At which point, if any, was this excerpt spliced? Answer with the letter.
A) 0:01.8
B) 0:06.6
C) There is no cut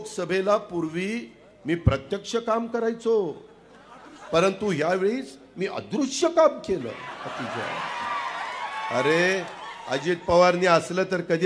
C